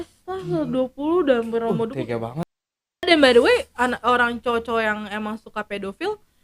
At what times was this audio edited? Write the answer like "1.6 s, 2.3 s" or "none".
2.9 s